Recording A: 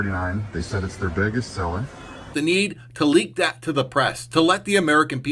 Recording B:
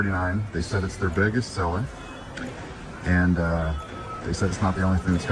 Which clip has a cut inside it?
A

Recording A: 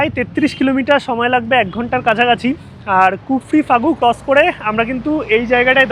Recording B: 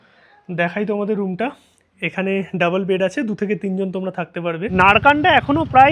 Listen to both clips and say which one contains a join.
B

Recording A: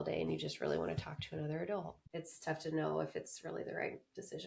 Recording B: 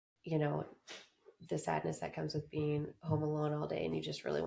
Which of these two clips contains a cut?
A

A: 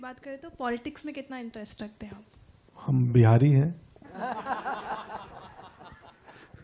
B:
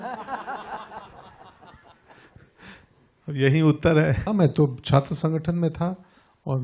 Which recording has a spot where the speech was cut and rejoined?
B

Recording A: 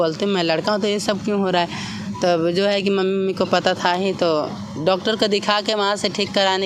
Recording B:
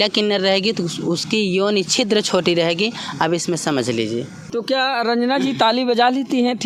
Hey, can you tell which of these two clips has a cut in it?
B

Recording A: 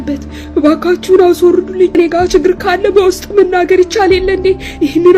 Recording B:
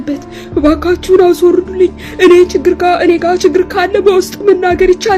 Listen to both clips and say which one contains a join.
A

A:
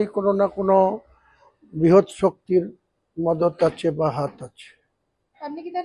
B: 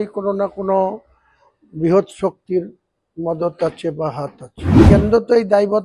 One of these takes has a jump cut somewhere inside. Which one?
B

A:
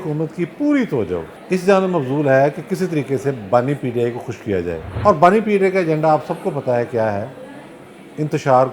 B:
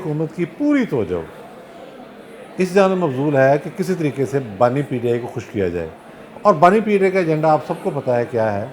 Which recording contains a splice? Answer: A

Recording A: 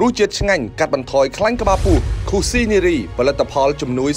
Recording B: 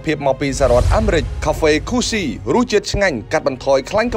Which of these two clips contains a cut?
B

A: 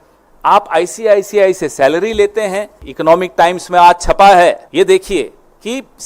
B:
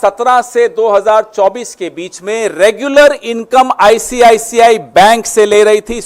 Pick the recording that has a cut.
A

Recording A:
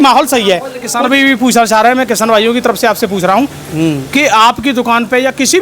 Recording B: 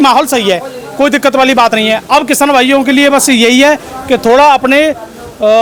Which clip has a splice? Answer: A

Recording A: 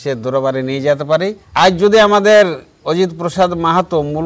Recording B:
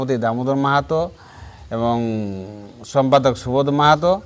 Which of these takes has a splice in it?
A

